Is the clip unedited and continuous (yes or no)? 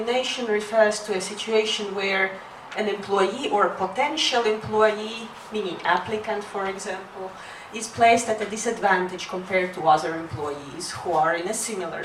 yes